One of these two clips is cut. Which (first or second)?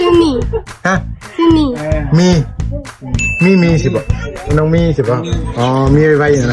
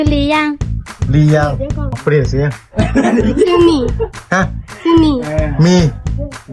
second